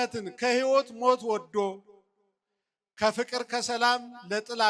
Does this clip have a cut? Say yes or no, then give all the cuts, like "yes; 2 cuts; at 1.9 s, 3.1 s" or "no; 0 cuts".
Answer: no; 0 cuts